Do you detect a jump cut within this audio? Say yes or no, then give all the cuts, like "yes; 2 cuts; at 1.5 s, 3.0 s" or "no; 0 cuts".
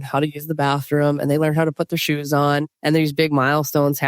yes; 1 cut; at 2.7 s